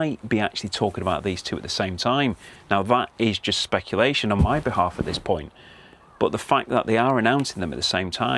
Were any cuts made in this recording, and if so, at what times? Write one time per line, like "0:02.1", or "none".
none